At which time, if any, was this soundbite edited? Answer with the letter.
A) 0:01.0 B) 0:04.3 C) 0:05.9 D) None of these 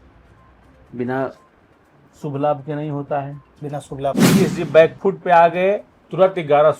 B